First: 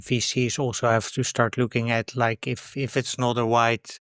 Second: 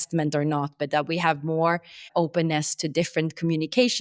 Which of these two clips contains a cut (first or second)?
second